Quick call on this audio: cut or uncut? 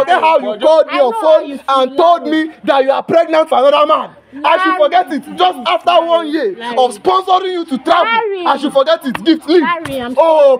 uncut